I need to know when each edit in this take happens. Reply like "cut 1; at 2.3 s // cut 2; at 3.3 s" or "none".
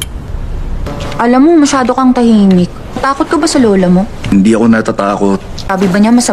cut 1; at 3.8 s